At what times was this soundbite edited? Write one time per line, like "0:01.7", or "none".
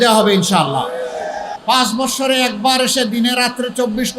0:01.5